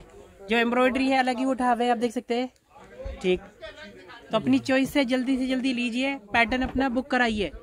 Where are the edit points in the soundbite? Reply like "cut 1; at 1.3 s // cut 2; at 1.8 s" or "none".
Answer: none